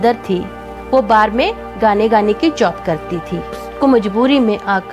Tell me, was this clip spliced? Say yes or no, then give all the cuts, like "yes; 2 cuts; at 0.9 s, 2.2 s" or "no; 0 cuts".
yes; 1 cut; at 3.7 s